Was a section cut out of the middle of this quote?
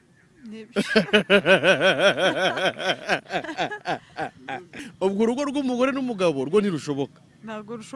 yes; 1 cut; at 4.9 s

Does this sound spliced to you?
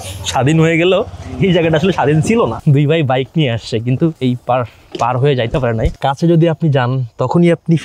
yes; 3 cuts; at 2.6 s, 4.2 s, 5.9 s

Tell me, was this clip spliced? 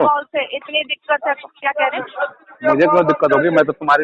no; 0 cuts

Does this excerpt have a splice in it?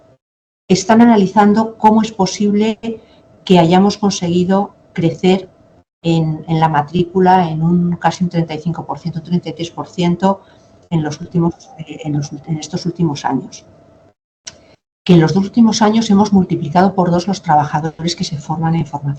no; 0 cuts

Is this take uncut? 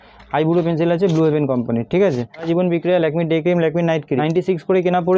no; 2 cuts; at 2.5 s, 4.2 s

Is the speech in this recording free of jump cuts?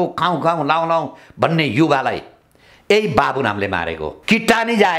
no; 1 cut; at 4.1 s

